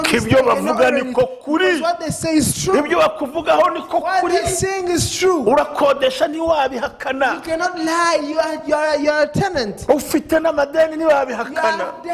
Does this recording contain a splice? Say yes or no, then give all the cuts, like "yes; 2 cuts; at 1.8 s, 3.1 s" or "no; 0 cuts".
no; 0 cuts